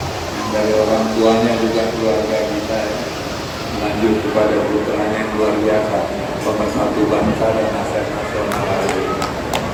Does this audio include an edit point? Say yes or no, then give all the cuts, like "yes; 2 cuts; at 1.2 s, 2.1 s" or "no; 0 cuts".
no; 0 cuts